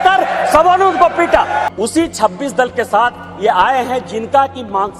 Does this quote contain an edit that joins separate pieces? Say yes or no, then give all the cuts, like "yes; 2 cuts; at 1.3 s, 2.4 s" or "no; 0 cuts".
yes; 1 cut; at 1.7 s